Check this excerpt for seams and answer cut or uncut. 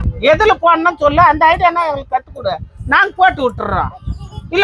uncut